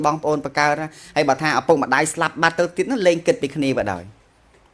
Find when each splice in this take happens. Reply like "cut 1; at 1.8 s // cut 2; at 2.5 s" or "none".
none